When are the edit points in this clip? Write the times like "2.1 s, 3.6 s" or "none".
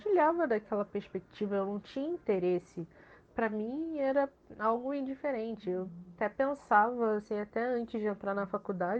none